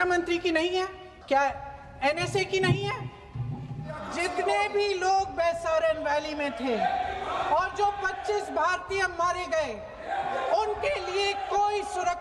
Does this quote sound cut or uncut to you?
cut